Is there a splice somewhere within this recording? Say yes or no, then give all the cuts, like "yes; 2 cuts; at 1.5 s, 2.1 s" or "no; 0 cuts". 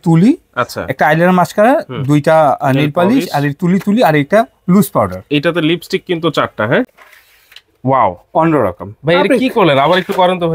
yes; 1 cut; at 7.0 s